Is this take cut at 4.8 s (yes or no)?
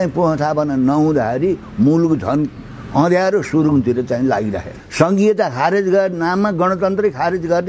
yes